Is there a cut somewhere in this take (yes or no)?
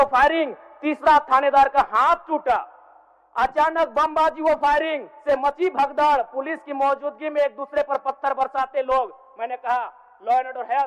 no